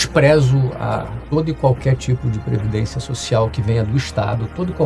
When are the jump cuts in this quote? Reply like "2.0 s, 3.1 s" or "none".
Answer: 1.1 s